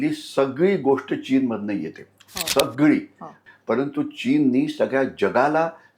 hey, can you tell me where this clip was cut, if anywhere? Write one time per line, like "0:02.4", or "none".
0:03.4

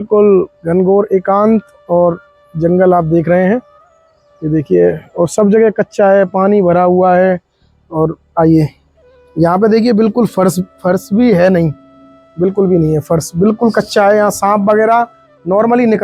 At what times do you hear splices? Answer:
none

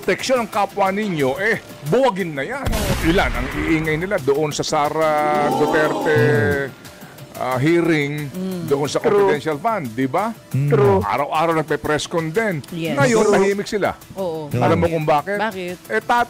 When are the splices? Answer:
0:02.9

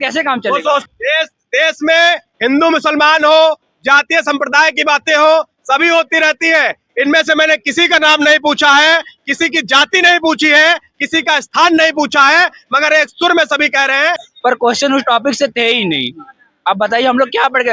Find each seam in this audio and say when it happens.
0:00.8
0:14.3

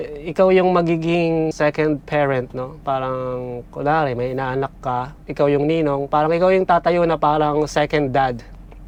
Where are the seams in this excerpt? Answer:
none

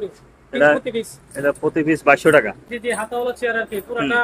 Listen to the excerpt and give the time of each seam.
0:02.6

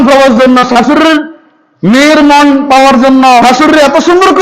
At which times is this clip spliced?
0:03.4

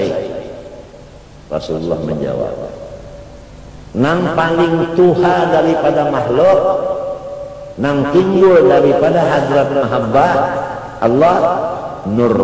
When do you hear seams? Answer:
none

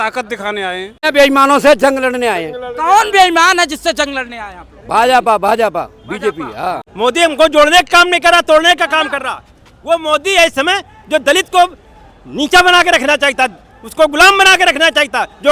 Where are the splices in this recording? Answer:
0:01.0
0:06.8

